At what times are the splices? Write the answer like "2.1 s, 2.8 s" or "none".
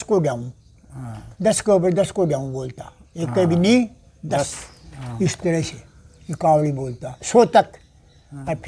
none